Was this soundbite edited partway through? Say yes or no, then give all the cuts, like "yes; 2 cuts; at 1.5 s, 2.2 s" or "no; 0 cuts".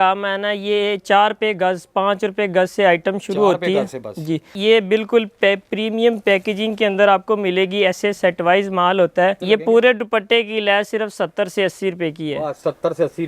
yes; 2 cuts; at 4.5 s, 9.4 s